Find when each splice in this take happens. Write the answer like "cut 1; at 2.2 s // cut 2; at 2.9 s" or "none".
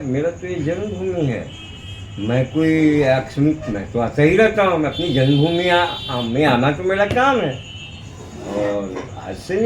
none